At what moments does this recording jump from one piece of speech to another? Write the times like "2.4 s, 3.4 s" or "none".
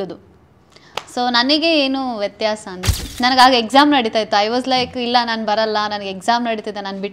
3.0 s